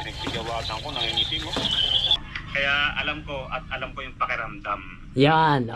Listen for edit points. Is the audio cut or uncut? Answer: cut